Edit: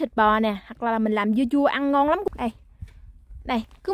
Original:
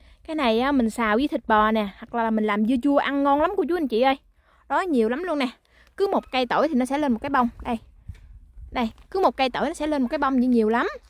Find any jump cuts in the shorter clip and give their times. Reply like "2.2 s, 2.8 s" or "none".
2.3 s